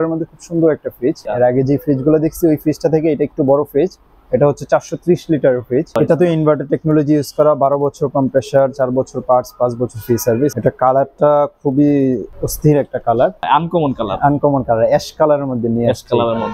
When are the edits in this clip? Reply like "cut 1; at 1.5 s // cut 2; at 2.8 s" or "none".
cut 1; at 1.2 s // cut 2; at 6.0 s // cut 3; at 10.5 s // cut 4; at 13.4 s